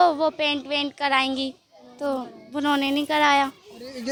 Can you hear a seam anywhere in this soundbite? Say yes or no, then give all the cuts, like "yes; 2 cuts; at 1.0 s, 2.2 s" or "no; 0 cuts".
no; 0 cuts